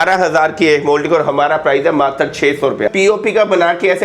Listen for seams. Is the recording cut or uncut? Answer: cut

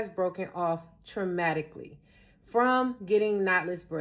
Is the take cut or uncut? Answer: uncut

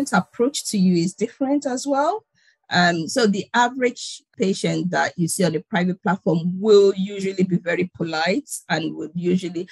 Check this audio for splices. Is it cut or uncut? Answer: cut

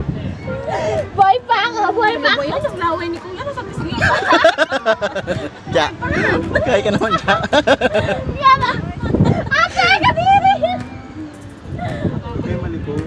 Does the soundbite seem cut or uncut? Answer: cut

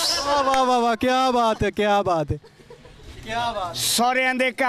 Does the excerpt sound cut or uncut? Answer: uncut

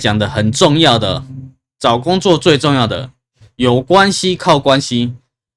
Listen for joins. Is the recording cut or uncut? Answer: uncut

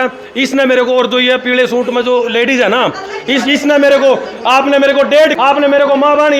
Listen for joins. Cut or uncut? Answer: uncut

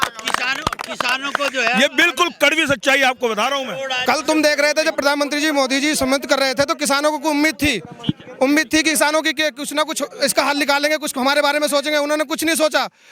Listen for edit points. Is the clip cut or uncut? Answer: cut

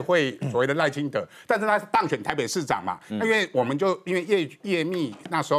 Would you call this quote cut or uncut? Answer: uncut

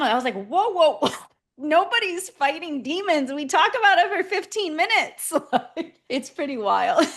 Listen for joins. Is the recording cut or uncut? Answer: cut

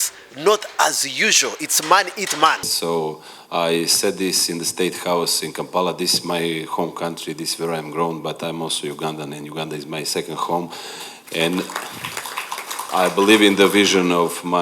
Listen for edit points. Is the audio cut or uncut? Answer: cut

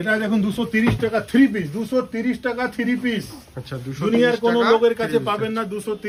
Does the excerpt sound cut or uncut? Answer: uncut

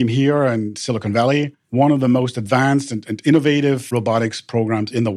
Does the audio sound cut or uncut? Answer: cut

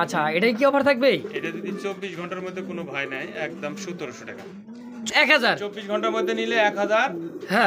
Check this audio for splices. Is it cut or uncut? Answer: cut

